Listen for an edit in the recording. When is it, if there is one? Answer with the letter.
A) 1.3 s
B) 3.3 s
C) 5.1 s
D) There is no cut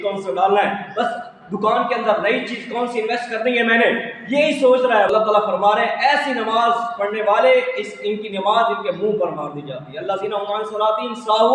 C